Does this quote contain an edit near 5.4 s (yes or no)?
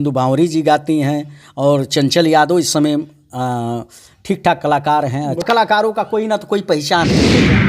yes